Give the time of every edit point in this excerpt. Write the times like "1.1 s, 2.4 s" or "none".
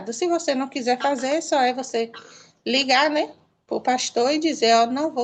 none

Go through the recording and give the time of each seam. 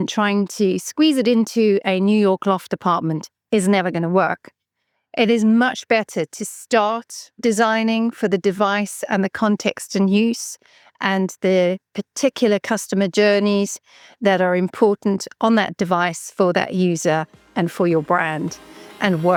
none

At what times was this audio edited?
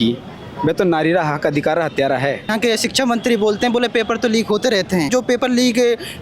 2.5 s, 5.1 s

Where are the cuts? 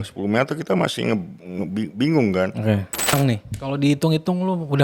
3.1 s

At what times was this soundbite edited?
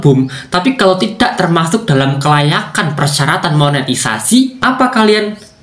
4.6 s

